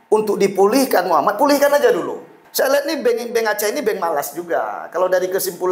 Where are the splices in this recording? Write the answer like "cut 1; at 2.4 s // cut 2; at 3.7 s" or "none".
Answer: cut 1; at 2.4 s